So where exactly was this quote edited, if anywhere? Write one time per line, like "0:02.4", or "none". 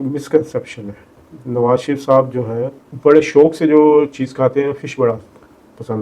0:02.8